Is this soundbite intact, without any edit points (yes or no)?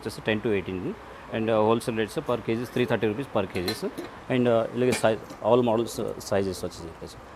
yes